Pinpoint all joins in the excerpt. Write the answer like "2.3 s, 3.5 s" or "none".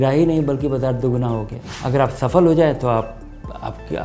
1.7 s